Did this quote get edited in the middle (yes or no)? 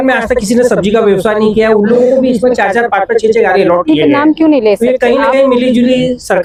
no